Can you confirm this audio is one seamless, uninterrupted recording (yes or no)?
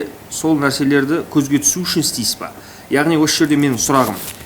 yes